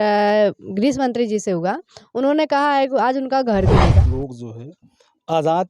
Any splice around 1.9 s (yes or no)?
no